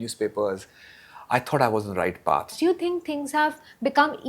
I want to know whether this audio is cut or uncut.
cut